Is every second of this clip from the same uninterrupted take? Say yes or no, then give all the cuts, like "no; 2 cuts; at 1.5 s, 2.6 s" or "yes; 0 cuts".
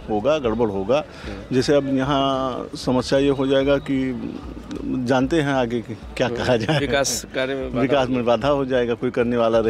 yes; 0 cuts